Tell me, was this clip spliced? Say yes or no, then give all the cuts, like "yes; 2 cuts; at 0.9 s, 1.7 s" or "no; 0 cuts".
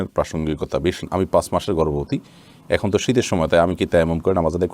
yes; 1 cut; at 1.0 s